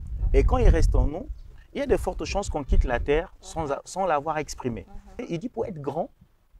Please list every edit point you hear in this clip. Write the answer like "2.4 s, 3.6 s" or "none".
5.1 s